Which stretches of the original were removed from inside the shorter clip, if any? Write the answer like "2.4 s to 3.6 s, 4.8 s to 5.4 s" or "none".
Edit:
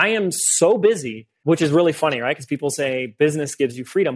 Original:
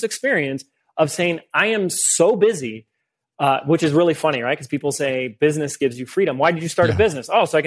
3.0 s to 3.6 s

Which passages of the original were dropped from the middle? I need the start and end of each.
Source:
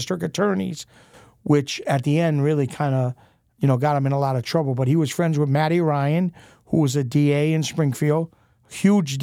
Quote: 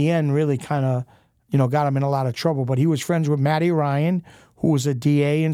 none

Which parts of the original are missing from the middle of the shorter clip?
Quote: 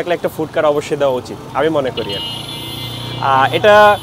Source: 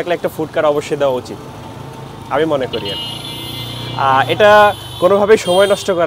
1.4 s to 2.1 s

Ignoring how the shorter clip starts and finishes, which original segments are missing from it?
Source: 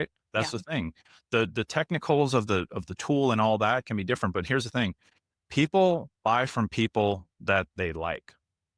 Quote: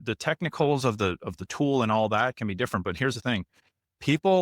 none

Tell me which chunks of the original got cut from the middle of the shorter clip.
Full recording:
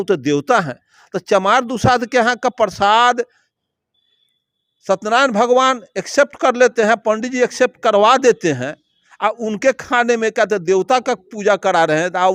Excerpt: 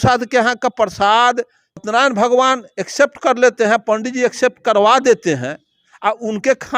3.7 s to 5.0 s

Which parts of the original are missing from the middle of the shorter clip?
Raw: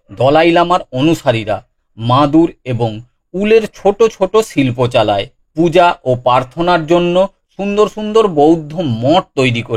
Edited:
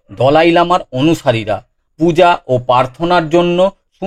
1.8 s to 5.4 s

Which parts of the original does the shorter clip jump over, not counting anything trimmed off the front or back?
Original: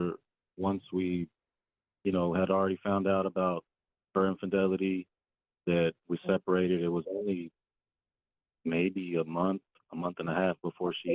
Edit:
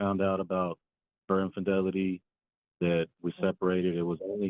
none

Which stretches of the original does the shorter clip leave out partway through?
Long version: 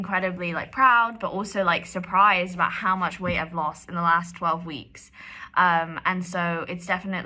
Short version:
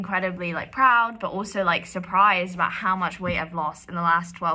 none

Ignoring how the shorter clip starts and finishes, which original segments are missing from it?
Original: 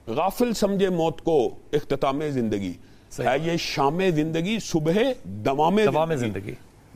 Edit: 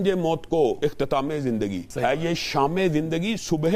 1.5 s to 1.7 s, 2.8 s to 3.1 s

